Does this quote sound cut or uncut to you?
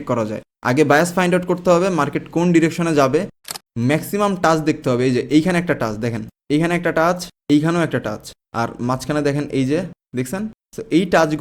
cut